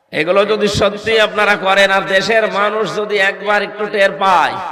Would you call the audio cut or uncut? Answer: uncut